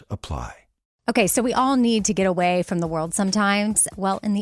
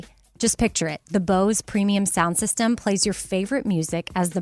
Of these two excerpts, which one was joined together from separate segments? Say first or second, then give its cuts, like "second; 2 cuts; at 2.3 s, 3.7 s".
first; 1 cut; at 0.9 s